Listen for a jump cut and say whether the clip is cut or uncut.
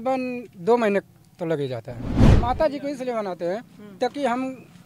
cut